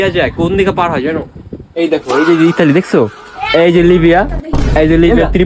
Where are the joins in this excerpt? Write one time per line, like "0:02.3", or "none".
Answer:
none